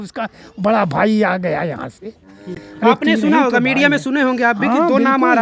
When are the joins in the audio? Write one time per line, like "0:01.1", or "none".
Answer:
none